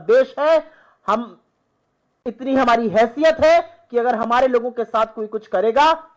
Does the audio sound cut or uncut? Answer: uncut